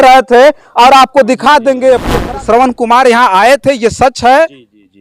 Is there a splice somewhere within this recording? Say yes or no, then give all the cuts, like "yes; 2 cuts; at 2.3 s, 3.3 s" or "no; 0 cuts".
yes; 1 cut; at 2.1 s